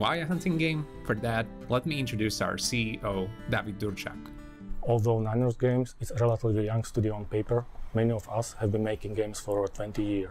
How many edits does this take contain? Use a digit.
0